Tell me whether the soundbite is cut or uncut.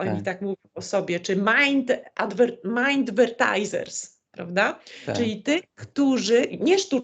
uncut